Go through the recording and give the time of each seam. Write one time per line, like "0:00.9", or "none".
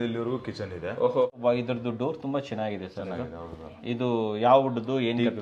0:01.3